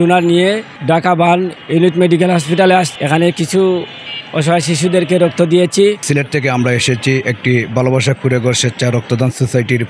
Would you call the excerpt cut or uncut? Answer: cut